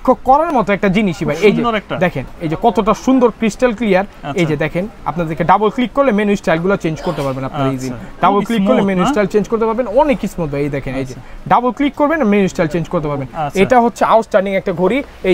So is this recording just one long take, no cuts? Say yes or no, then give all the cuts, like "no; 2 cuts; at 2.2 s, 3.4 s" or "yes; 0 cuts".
yes; 0 cuts